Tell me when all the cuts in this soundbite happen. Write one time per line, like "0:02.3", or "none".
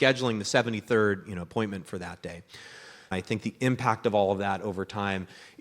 0:03.1